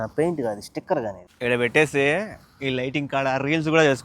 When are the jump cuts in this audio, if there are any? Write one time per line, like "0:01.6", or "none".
0:01.2